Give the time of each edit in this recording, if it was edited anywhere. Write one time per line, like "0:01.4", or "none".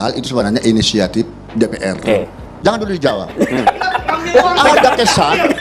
0:02.4